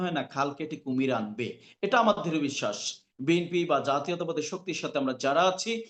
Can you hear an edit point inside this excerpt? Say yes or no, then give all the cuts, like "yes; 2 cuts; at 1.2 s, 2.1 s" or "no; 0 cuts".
no; 0 cuts